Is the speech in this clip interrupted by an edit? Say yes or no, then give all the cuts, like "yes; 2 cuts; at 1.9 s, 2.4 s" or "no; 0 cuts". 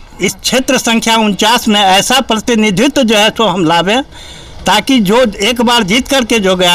no; 0 cuts